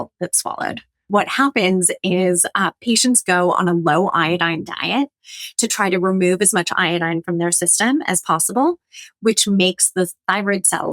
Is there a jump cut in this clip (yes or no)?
yes